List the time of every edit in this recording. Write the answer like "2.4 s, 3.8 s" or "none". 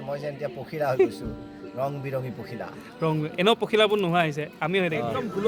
none